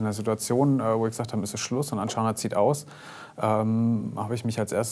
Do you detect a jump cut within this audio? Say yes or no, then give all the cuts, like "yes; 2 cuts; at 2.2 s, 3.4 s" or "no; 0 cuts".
no; 0 cuts